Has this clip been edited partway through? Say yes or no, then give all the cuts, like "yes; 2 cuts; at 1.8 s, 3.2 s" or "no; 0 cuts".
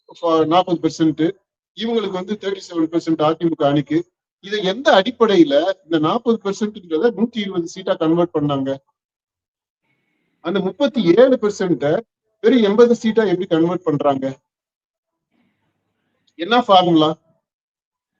no; 0 cuts